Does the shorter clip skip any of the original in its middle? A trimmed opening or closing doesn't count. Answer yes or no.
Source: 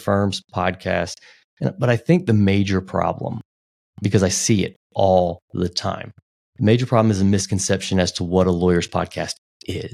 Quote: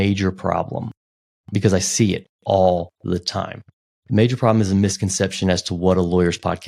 no